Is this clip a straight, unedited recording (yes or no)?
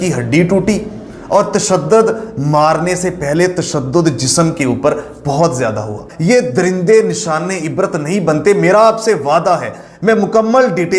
no